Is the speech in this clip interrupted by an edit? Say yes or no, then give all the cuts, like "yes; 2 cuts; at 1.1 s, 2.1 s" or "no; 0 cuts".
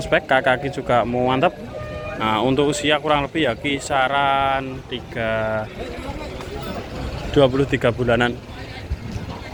no; 0 cuts